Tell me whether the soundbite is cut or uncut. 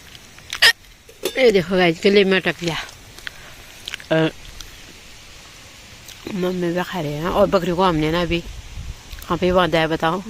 uncut